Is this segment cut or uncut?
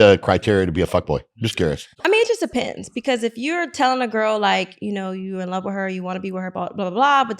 cut